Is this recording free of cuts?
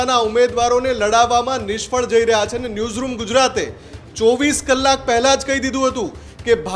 yes; 0 cuts

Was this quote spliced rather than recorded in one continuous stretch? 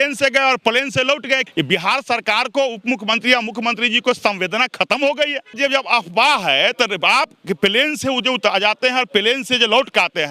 yes; 2 cuts; at 1.4 s, 5.5 s

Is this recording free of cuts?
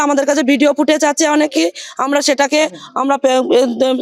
yes; 0 cuts

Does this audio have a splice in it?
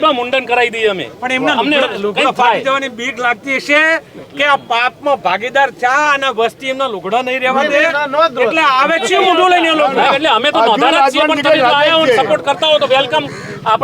no; 0 cuts

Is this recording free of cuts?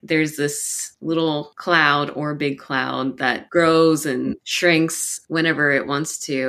yes; 0 cuts

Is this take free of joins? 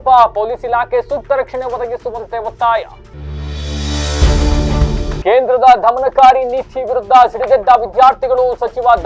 yes; 0 cuts

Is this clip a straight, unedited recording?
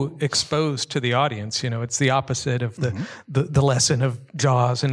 yes; 0 cuts

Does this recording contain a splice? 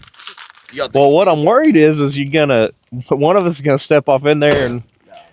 no; 0 cuts

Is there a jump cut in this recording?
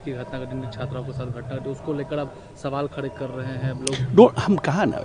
no; 0 cuts

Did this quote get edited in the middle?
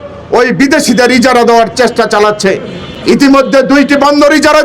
no; 0 cuts

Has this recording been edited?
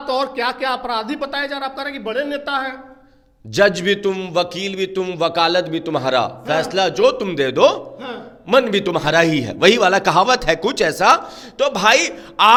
no; 0 cuts

